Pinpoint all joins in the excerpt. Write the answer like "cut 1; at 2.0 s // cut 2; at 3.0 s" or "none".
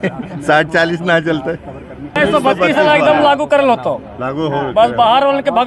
cut 1; at 2.1 s